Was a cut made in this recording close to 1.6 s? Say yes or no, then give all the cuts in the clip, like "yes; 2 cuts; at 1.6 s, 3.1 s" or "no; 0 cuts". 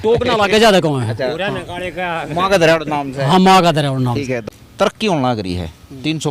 no; 1 cut; at 4.4 s